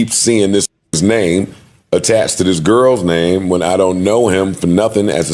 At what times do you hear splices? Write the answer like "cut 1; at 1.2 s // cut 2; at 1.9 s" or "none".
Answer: none